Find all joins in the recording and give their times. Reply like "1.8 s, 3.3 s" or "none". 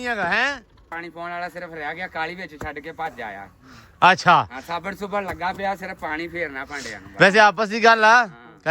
0.9 s